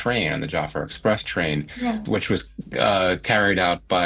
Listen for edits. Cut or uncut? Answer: cut